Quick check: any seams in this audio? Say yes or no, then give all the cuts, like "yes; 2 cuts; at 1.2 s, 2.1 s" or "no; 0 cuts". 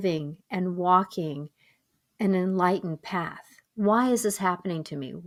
no; 0 cuts